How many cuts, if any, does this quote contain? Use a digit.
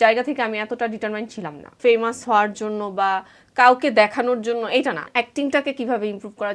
2